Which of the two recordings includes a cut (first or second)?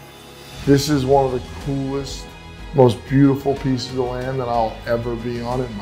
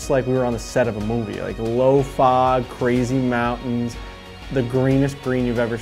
second